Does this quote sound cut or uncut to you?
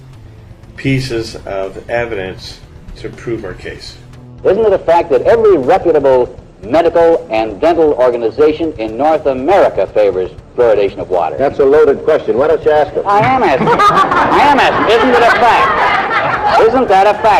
uncut